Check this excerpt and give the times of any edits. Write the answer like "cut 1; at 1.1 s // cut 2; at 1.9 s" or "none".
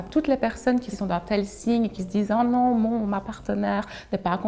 cut 1; at 0.9 s